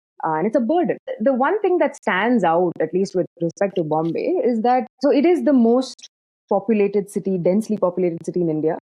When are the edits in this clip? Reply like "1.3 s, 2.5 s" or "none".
1.1 s